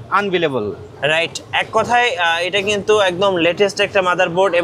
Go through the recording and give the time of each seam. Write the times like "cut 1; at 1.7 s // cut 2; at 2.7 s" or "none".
none